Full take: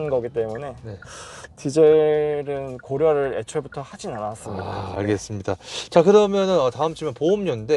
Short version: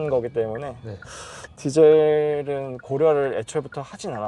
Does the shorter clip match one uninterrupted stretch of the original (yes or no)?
yes